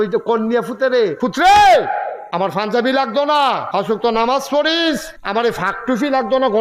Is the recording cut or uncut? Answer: cut